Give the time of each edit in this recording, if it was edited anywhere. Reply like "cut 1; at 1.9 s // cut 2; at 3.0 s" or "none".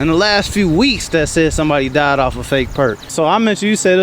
cut 1; at 3.0 s